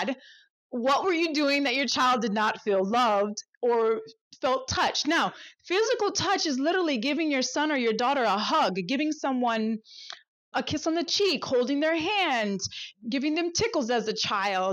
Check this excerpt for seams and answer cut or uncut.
cut